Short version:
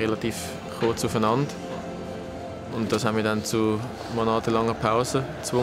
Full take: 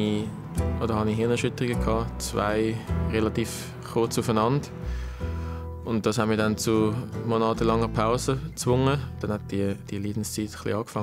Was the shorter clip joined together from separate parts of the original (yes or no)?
no